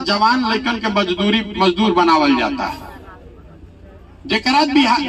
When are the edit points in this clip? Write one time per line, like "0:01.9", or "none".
none